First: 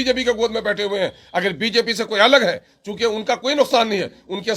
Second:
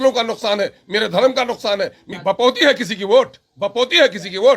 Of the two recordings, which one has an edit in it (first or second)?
second